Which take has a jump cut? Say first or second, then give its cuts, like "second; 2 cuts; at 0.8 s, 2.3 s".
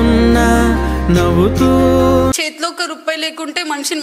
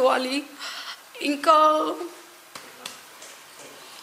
first; 1 cut; at 2.5 s